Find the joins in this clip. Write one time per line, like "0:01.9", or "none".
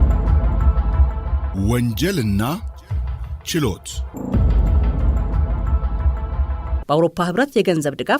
0:01.5
0:04.0
0:06.8